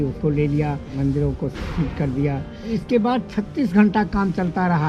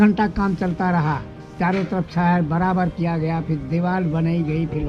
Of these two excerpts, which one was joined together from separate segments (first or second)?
first